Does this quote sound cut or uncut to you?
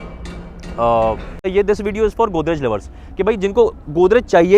cut